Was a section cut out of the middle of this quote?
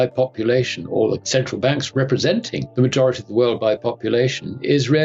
yes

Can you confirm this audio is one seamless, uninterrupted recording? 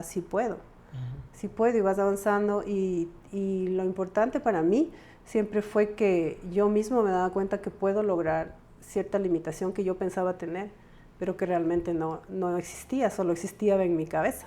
yes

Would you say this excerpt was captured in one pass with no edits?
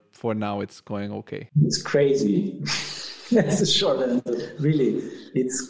no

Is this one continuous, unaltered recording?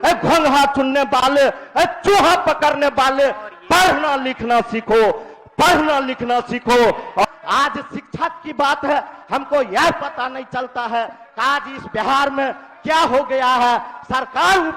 no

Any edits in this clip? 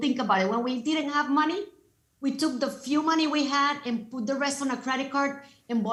no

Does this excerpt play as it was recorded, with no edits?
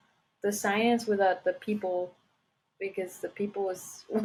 yes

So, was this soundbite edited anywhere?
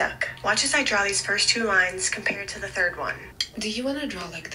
yes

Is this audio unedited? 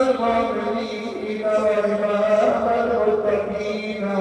yes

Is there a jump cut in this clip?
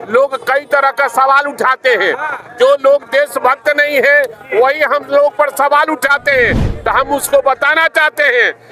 no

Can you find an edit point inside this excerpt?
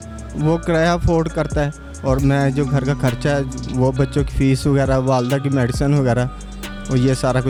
no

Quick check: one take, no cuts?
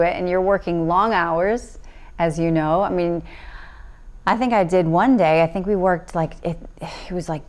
yes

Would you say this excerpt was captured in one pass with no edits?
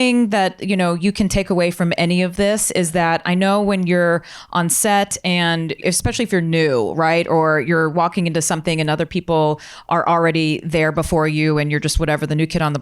no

